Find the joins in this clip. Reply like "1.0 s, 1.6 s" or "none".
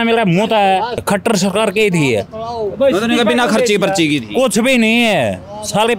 1.0 s